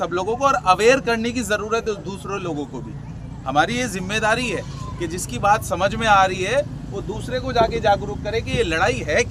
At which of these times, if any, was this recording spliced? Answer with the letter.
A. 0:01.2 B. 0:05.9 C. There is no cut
C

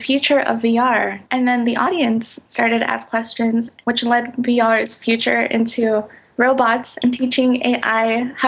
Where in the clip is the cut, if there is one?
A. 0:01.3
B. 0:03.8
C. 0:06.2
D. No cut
A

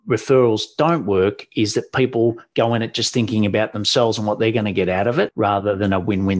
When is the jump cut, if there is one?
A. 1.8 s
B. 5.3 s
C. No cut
B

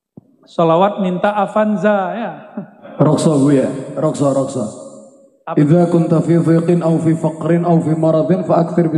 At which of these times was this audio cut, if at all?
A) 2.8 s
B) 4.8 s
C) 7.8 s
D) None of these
A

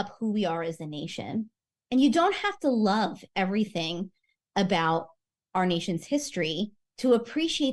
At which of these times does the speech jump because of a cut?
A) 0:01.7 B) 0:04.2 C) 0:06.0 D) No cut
A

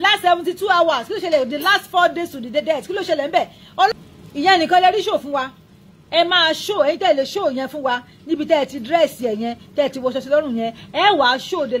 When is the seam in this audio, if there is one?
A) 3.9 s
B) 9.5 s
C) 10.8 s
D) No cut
A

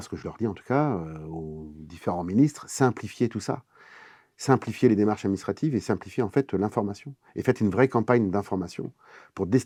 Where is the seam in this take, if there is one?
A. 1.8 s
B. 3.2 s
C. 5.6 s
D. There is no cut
D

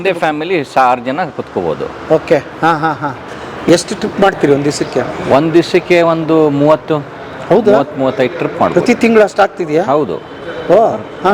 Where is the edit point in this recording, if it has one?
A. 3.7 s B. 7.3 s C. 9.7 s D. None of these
A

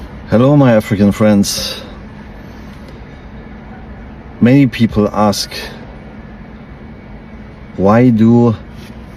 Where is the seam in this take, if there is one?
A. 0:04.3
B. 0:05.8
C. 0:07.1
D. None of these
D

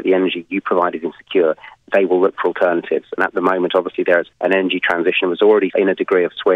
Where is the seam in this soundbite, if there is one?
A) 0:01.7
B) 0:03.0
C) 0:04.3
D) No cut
C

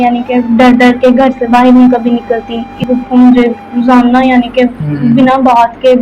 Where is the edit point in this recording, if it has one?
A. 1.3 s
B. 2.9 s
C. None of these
B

